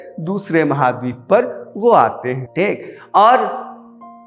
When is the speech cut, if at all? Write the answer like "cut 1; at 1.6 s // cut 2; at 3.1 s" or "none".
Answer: none